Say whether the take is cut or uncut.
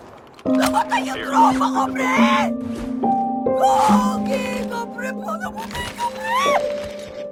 uncut